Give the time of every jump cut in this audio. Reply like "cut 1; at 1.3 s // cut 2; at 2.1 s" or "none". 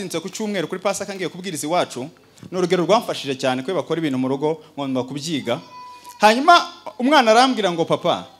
none